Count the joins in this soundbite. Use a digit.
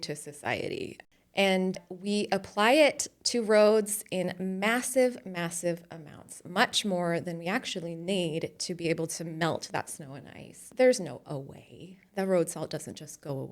2